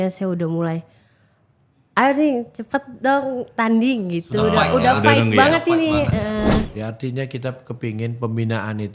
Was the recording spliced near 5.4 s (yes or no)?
no